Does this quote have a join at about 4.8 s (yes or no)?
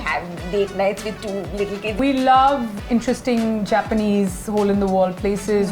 no